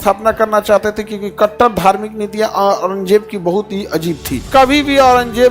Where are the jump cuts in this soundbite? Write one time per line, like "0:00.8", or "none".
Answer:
0:04.5

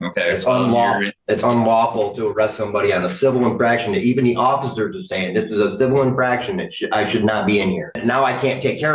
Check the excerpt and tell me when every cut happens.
0:01.1
0:08.0

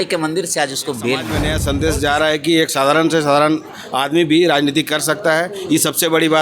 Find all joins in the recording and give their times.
0:01.3

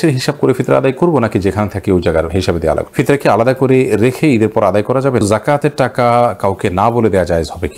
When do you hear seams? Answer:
0:02.9
0:05.2

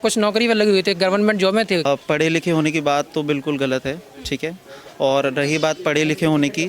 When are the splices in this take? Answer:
0:01.8

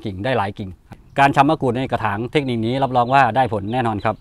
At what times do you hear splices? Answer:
0:01.0

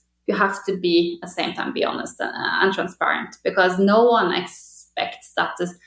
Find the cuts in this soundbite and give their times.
none

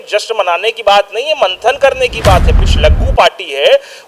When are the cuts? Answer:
0:02.5

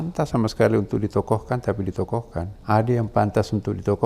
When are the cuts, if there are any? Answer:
0:02.5

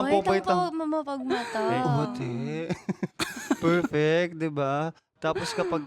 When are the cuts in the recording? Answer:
none

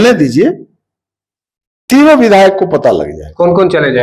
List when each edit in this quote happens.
none

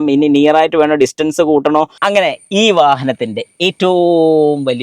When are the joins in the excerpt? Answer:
0:02.0

